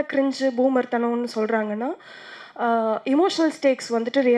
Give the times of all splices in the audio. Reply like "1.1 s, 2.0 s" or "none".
none